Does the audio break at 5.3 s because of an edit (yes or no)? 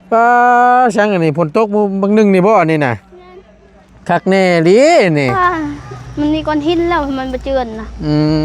yes